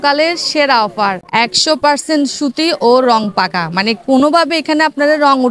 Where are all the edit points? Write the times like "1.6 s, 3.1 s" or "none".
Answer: 1.2 s